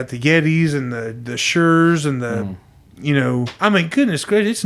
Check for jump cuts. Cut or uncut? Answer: cut